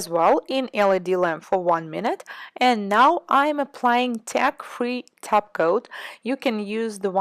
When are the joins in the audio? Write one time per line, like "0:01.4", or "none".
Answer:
0:03.1